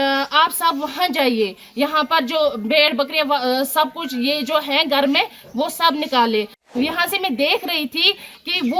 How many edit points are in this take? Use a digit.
1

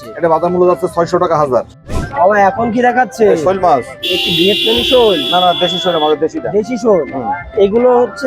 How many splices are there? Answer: 1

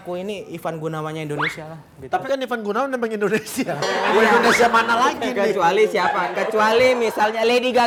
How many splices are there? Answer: 0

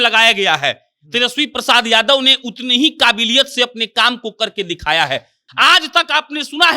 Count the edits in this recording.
1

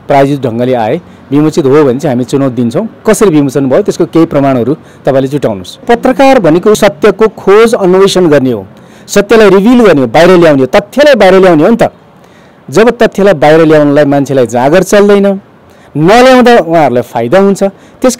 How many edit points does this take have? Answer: 2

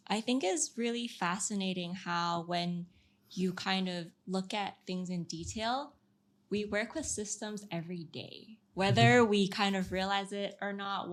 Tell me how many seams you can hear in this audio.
0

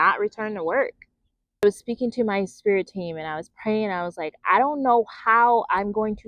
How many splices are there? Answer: 1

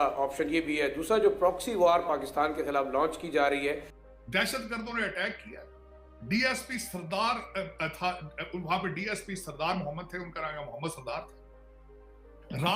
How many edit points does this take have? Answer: 1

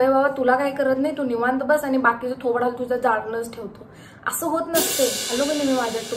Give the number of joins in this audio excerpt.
1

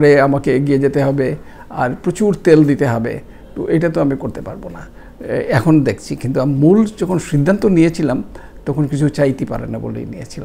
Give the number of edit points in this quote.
0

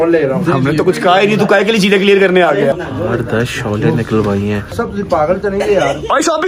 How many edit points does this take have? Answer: 2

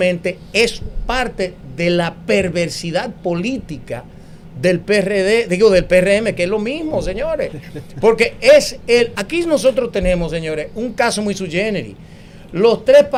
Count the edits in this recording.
0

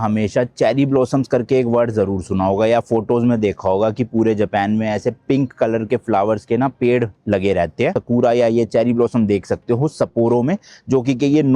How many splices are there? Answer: 1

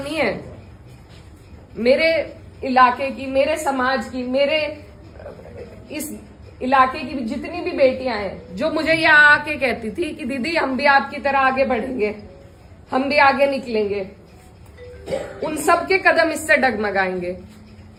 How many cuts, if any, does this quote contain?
0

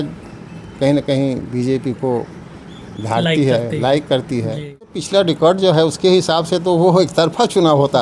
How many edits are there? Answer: 1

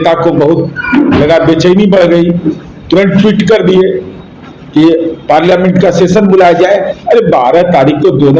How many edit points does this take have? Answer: 0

